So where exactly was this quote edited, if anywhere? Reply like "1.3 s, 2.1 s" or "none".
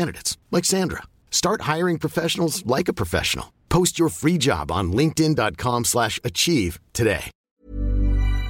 7.3 s